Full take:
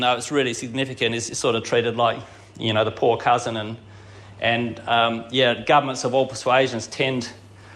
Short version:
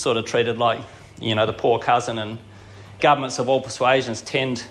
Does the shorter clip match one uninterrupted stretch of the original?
no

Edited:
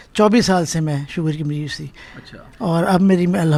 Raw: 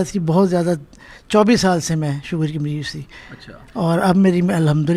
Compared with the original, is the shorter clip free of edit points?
yes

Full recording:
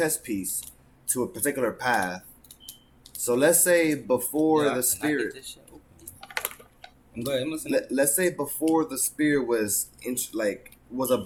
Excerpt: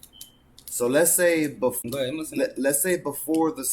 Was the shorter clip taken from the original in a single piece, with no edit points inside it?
no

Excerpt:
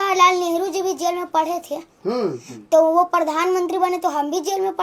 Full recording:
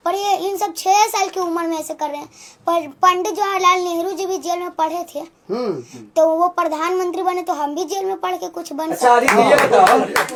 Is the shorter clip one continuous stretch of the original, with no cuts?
yes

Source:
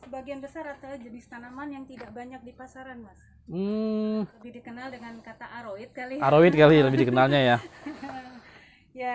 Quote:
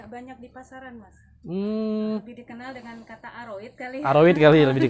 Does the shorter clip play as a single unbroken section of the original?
no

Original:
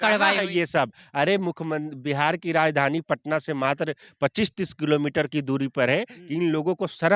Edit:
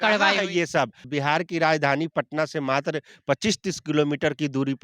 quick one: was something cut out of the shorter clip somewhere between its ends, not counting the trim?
yes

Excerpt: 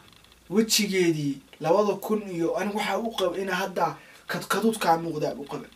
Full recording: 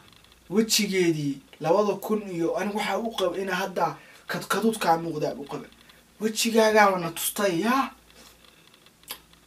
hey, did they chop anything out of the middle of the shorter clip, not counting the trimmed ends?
no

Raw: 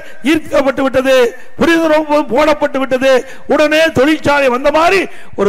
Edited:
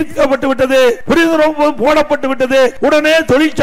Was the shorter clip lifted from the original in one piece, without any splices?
no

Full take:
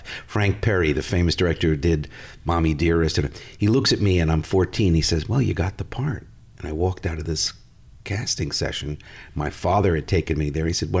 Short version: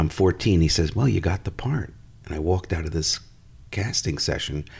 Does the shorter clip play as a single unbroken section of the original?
yes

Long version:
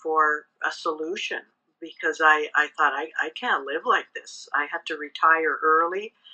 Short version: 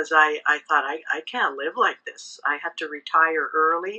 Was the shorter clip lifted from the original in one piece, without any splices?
yes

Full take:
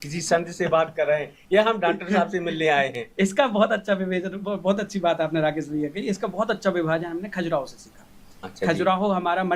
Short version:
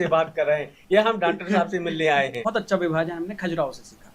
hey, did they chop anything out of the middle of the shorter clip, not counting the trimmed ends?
yes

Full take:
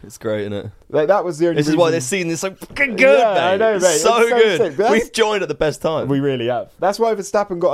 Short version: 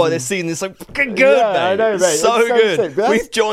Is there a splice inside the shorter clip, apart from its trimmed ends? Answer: no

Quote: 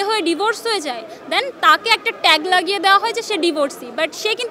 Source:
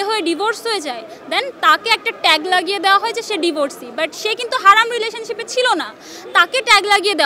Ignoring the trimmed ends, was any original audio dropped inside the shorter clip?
no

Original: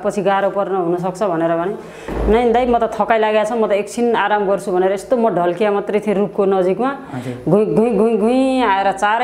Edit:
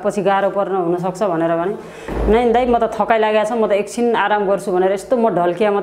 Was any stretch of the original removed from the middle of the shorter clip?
no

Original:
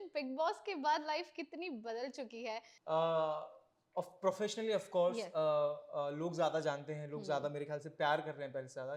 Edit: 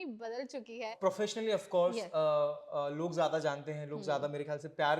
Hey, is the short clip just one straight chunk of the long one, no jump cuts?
no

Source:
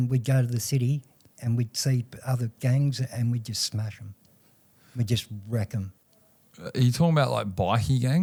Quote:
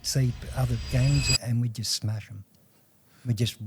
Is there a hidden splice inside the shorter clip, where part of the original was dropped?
no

